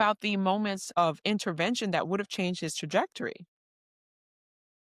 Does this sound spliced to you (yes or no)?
no